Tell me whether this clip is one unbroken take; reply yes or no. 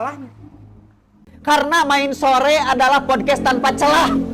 no